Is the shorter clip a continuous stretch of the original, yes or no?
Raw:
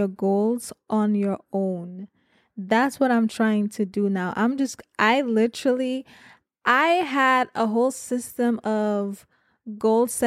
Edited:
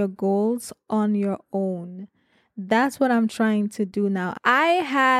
no